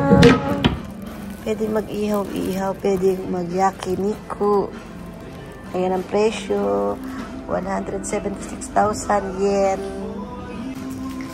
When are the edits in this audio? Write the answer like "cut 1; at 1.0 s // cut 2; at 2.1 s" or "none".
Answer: none